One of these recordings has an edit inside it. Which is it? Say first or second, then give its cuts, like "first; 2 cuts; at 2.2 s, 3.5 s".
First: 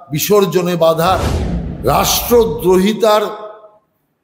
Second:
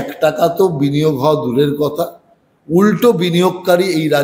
first; 1 cut; at 1.3 s